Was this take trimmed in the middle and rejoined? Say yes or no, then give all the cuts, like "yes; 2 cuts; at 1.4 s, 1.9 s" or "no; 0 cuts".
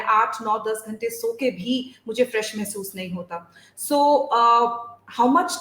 no; 0 cuts